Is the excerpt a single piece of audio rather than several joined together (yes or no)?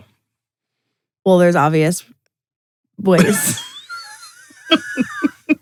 yes